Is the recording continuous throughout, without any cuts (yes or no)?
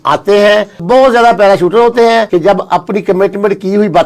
no